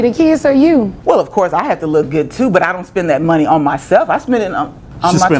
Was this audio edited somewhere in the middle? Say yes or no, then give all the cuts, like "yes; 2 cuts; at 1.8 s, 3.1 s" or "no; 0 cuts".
yes; 1 cut; at 1.0 s